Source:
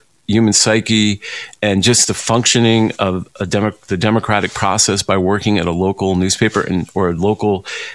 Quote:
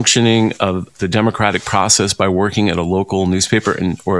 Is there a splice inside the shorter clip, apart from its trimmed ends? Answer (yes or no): yes